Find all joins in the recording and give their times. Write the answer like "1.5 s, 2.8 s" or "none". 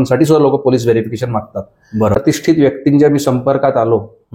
2.1 s